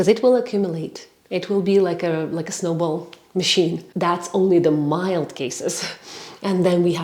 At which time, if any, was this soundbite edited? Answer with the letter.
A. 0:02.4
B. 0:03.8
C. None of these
B